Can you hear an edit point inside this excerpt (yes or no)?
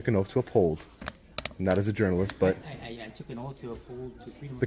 no